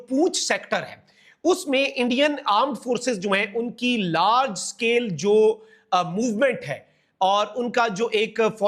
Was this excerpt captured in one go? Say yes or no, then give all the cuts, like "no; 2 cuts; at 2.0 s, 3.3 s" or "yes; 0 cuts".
yes; 0 cuts